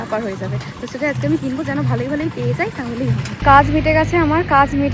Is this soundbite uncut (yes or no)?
no